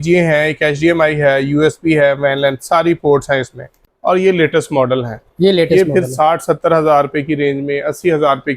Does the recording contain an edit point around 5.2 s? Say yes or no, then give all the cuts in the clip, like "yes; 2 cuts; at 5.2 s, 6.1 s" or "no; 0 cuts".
no; 1 cut; at 3.8 s